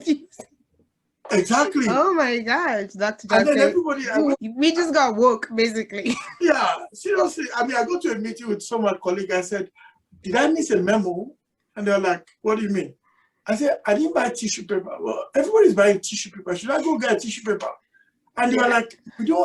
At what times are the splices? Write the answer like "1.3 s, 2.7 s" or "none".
4.3 s